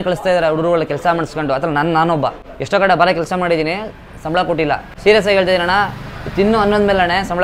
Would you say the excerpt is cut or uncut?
cut